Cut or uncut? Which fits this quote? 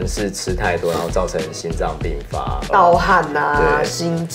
uncut